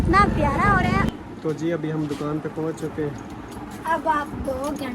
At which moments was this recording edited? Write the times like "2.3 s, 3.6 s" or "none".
1.1 s